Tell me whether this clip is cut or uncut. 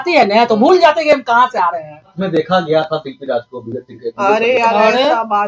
cut